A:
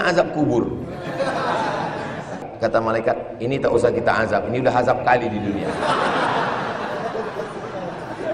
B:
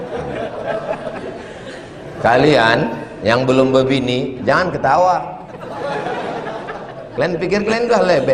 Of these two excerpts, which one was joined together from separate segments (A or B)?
A